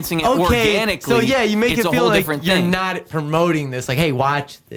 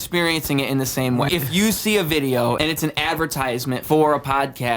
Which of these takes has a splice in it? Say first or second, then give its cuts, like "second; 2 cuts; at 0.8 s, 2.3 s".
second; 3 cuts; at 1.3 s, 2.6 s, 3.8 s